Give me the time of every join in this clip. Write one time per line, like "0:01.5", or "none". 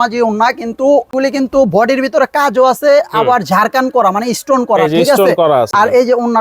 0:01.1
0:05.7